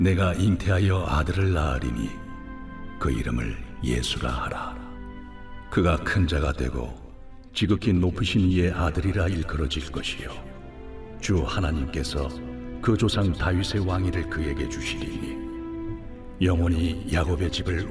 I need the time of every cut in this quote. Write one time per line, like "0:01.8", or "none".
none